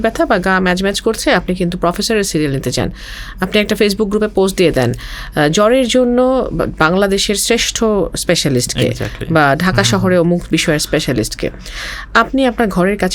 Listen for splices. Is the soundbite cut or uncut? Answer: uncut